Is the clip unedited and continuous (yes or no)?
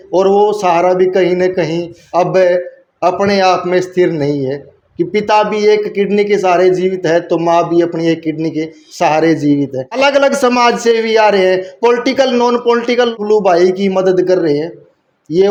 yes